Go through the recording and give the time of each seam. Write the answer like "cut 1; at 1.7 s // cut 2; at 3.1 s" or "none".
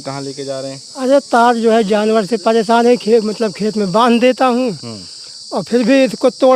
none